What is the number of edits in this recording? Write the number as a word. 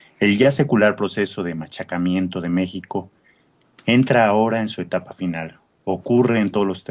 one